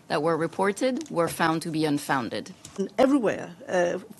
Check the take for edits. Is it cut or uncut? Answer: cut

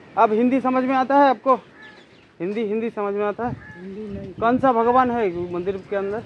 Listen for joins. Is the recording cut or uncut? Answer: uncut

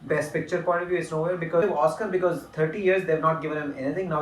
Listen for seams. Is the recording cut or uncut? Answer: cut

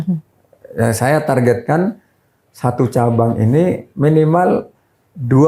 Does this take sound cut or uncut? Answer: uncut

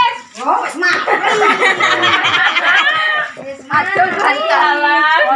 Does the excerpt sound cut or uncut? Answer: uncut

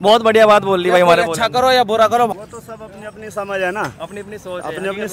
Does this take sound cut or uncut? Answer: cut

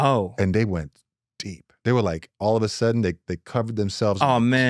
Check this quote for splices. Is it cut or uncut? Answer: uncut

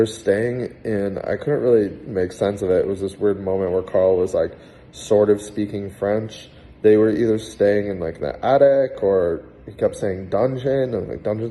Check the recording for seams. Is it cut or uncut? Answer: uncut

